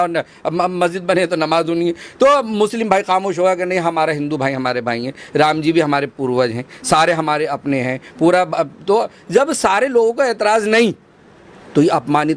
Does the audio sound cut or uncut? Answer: uncut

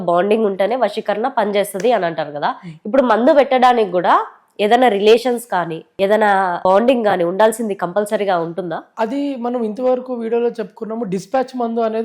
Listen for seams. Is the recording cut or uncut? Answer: cut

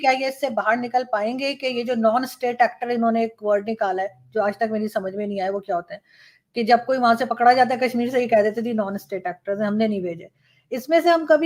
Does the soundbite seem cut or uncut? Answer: uncut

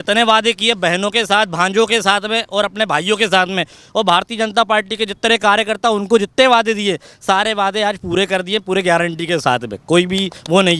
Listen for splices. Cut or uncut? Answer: uncut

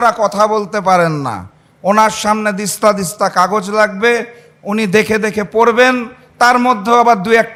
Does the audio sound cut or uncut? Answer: uncut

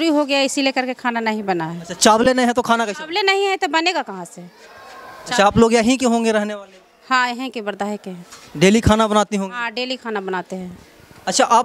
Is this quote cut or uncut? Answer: uncut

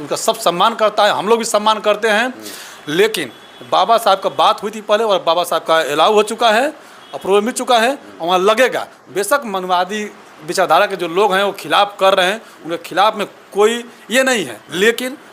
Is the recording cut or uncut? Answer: uncut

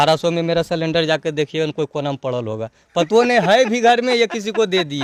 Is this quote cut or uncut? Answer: uncut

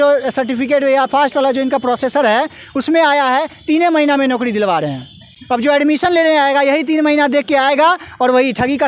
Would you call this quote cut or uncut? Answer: uncut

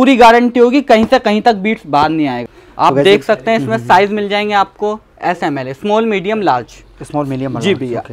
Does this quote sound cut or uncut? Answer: cut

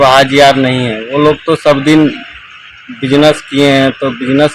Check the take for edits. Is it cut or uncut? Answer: uncut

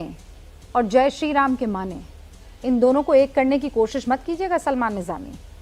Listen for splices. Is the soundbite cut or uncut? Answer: uncut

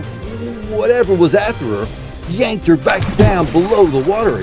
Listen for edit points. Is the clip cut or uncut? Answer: uncut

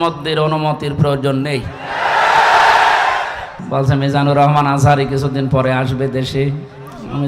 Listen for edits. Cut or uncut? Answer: cut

